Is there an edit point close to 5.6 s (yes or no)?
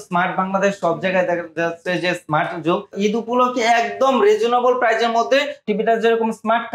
yes